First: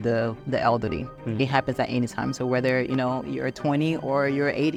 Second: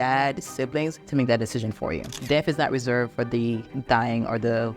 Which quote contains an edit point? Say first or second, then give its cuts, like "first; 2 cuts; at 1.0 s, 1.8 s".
second; 2 cuts; at 1.0 s, 2.1 s